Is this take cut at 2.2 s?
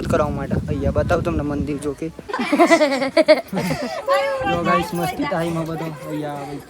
yes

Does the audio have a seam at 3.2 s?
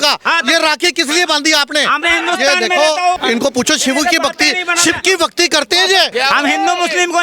yes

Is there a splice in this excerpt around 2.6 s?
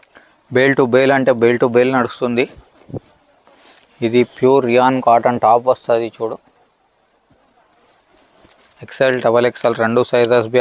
no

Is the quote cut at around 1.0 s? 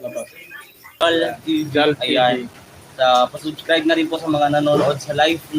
yes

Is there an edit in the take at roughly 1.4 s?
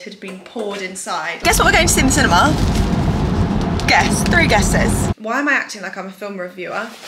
yes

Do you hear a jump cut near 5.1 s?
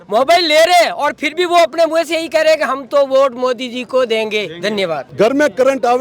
yes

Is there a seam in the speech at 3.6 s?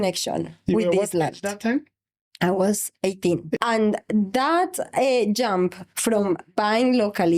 yes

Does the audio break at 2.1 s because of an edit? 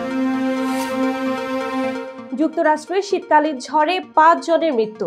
no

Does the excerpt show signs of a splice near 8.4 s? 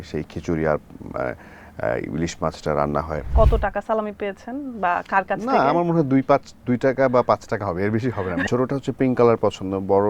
yes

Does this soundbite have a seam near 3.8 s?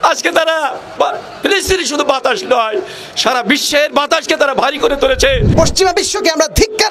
no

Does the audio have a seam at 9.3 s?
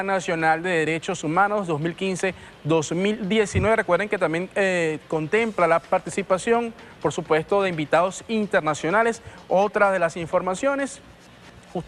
no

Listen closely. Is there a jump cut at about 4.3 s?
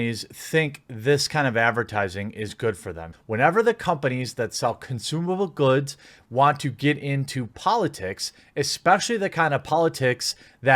no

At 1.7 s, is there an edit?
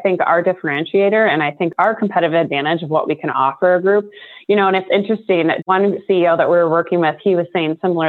yes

